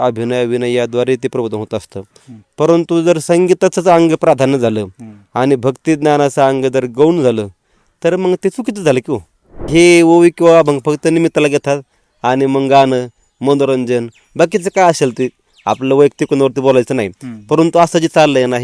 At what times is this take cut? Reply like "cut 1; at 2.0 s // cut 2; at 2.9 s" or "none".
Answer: cut 1; at 9.7 s